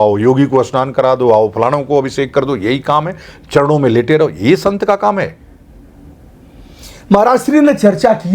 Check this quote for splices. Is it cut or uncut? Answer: uncut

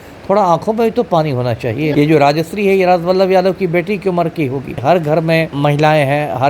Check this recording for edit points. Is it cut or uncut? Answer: cut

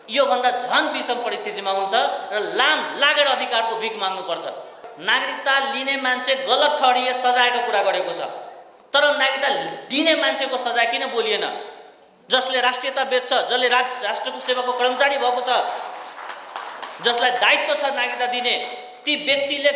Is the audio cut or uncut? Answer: cut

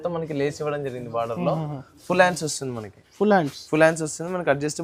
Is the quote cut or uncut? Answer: uncut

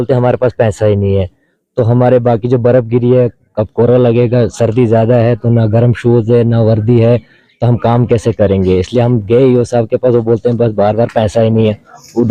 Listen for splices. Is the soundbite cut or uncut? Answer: uncut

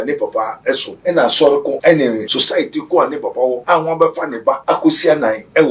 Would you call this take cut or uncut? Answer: cut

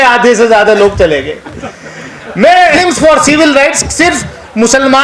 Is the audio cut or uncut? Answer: cut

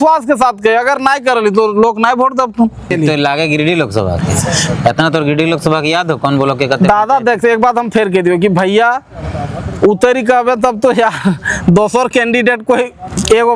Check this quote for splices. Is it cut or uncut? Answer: cut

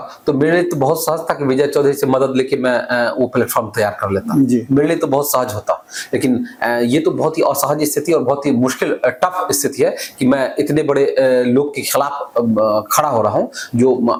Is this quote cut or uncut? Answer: uncut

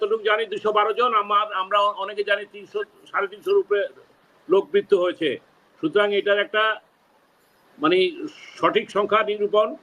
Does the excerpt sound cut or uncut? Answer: uncut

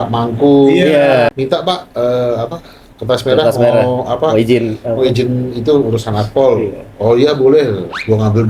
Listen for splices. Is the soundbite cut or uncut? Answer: cut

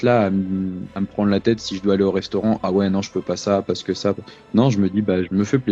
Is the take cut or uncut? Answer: uncut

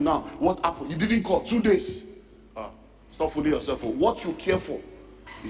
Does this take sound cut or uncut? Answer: uncut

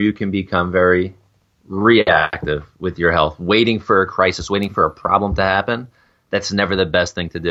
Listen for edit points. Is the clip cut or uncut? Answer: uncut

